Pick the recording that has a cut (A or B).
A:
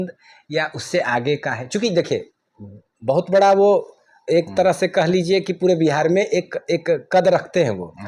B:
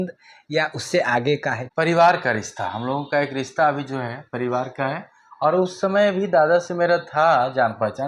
B